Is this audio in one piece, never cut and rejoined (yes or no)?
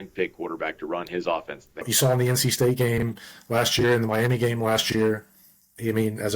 no